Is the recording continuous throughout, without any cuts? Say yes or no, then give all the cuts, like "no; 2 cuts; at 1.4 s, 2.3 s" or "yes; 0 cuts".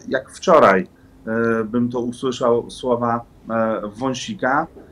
yes; 0 cuts